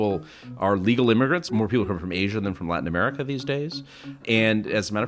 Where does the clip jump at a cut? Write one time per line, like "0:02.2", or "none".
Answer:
0:01.5
0:04.2